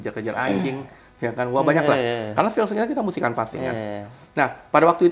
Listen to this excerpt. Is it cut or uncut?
uncut